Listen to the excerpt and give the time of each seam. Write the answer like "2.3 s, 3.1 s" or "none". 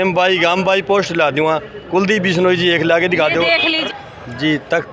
3.8 s

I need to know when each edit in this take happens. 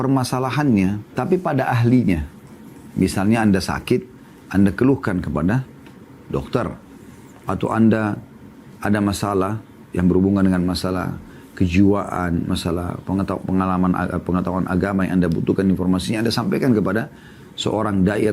1.2 s

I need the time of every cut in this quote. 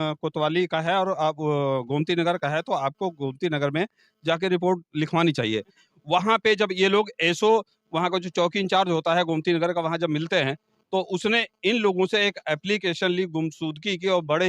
5.9 s

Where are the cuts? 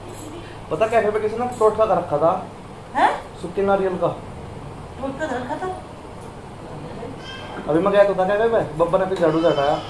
none

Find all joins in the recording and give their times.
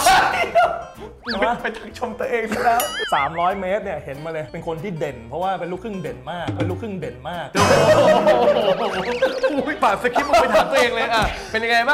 3.0 s, 9.8 s

